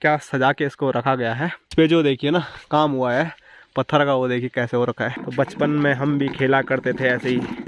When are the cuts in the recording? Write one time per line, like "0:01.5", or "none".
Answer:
0:01.7
0:05.2